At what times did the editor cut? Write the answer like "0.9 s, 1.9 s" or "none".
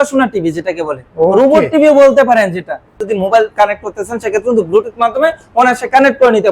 3.0 s